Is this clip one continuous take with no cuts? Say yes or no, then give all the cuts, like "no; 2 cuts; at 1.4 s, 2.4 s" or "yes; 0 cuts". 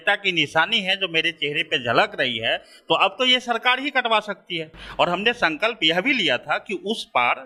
yes; 0 cuts